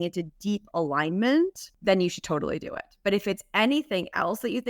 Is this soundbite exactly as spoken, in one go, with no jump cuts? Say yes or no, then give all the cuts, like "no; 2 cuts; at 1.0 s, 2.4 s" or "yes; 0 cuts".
no; 1 cut; at 1.7 s